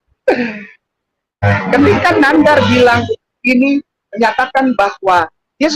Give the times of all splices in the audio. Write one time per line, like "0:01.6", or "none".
0:01.4